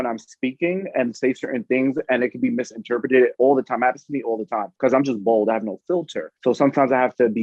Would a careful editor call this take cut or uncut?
cut